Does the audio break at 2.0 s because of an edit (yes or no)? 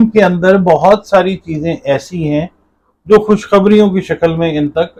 no